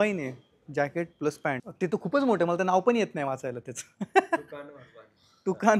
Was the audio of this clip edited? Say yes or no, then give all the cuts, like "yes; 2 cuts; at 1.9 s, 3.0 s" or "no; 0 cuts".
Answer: yes; 1 cut; at 1.7 s